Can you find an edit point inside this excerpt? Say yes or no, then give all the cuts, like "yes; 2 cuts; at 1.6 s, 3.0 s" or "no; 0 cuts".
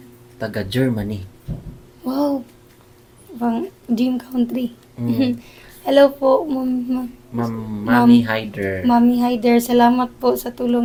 no; 0 cuts